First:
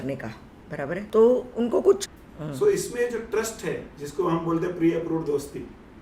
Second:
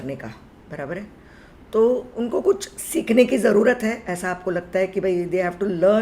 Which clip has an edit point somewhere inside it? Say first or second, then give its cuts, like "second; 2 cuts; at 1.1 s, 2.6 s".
first; 2 cuts; at 1.1 s, 2.2 s